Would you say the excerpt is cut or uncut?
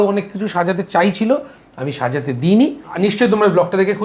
cut